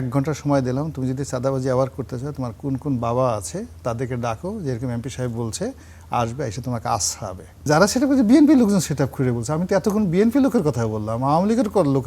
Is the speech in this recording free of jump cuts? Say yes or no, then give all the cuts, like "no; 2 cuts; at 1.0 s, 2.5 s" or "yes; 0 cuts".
no; 1 cut; at 7.7 s